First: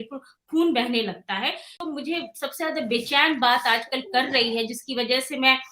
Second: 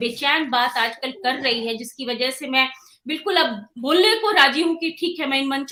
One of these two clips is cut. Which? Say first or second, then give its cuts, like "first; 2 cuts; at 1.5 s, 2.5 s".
first; 1 cut; at 1.8 s